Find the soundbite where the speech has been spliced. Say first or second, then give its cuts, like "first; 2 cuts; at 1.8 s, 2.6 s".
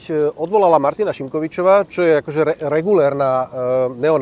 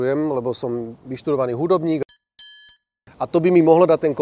second; 1 cut; at 2.5 s